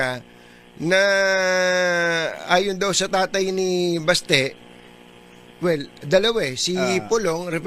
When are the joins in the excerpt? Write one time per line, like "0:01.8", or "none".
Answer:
0:05.0